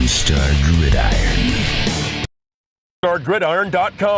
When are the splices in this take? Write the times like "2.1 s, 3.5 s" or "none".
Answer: 2.3 s

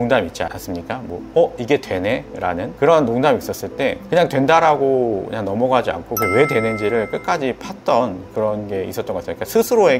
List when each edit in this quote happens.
none

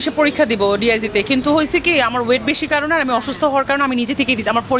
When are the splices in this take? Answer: none

